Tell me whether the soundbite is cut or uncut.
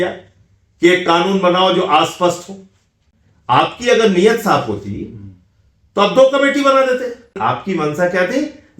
cut